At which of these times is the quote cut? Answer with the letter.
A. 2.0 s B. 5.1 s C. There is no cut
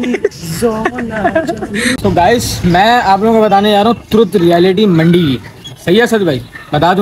A